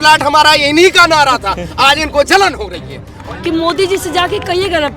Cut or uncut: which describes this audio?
cut